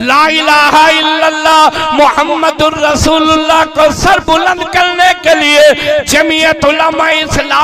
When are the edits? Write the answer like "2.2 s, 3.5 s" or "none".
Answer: none